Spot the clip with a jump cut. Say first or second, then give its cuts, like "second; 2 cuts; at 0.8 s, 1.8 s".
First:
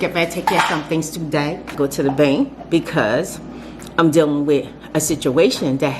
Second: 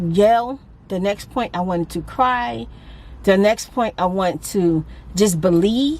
first; 1 cut; at 1.7 s